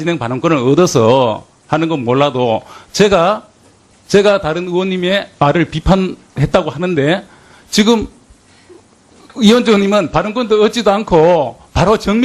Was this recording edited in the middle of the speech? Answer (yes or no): yes